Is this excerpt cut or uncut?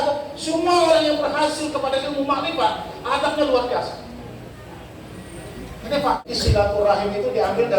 cut